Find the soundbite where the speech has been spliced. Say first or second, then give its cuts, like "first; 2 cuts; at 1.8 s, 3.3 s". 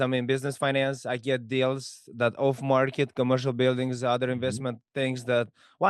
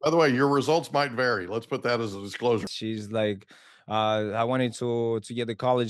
second; 1 cut; at 2.7 s